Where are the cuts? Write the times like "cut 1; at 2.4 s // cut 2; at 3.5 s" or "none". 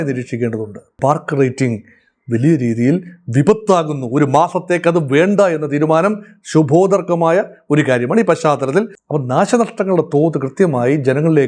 cut 1; at 0.9 s // cut 2; at 9.0 s